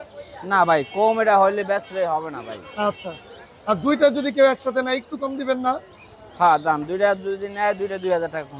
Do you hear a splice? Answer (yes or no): no